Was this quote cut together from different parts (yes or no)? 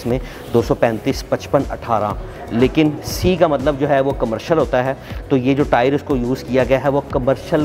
no